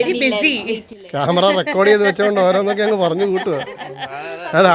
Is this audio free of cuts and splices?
yes; 0 cuts

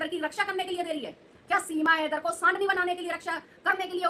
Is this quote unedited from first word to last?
yes; 0 cuts

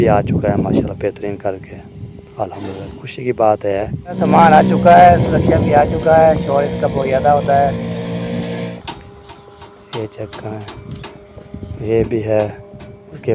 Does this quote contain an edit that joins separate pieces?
yes; 2 cuts; at 4.0 s, 8.7 s

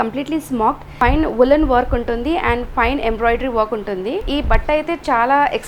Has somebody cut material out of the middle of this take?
yes; 2 cuts; at 0.9 s, 4.3 s

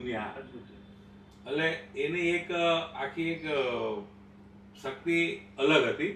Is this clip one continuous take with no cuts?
yes; 0 cuts

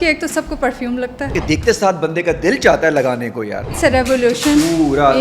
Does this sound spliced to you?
yes; 2 cuts; at 1.3 s, 3.7 s

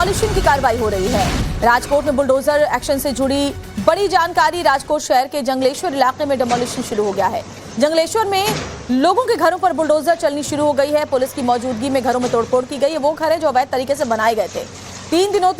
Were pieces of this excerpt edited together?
yes; 1 cut; at 4.3 s

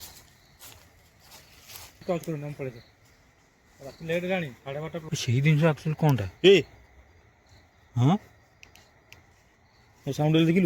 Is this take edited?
yes; 2 cuts; at 2.0 s, 5.0 s

